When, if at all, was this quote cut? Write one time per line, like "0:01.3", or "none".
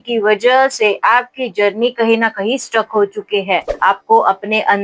0:03.7